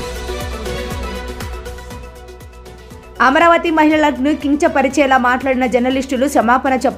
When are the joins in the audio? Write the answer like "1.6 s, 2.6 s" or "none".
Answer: 1.8 s, 2.9 s